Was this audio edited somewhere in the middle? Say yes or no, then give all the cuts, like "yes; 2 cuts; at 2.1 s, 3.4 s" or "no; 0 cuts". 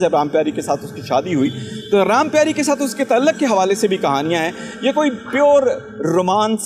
no; 0 cuts